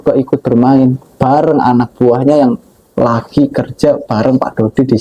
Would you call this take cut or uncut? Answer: uncut